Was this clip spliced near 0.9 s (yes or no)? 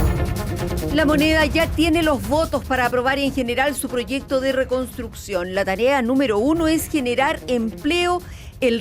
yes